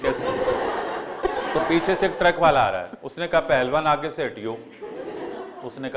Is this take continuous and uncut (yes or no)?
no